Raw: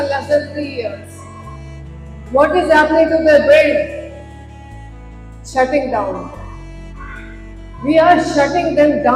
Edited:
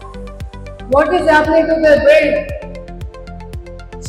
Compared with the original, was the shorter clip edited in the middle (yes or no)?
no